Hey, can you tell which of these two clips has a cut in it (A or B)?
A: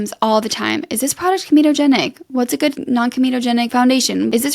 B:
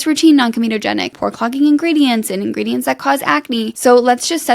B